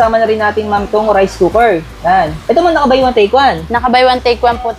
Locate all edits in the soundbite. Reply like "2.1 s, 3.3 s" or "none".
none

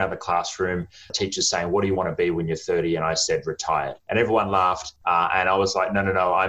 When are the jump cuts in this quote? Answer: 4.0 s, 4.9 s

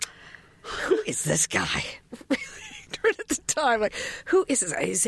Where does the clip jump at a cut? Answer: 2.1 s

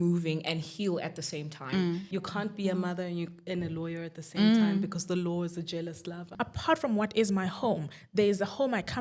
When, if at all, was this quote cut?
2.1 s, 6.3 s

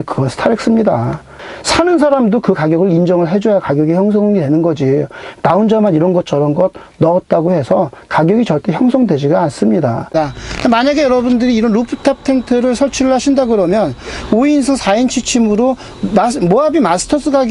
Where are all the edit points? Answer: 1.4 s, 10.1 s

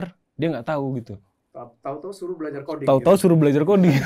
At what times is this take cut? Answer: none

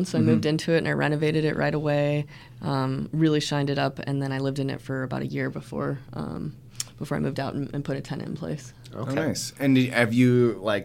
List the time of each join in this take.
none

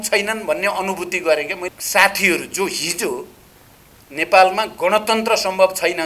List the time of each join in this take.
1.7 s

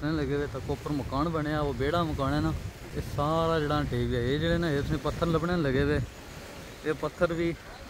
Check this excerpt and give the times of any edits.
3.0 s

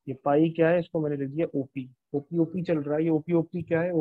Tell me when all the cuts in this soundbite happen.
none

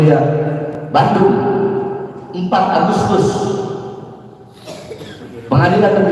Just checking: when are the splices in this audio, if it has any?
none

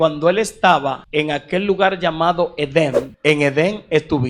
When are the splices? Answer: 1.0 s, 3.1 s

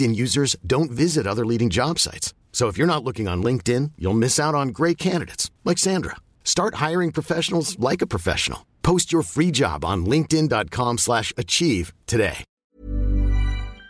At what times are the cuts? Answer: 12.6 s

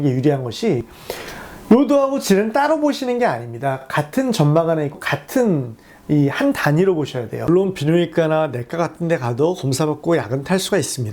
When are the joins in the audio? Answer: 7.3 s

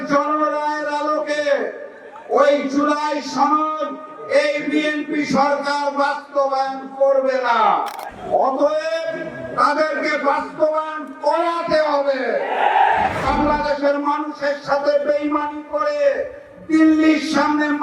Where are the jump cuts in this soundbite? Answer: 8.1 s, 13.2 s

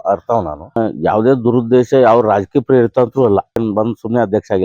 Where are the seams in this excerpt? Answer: 0.8 s, 3.6 s

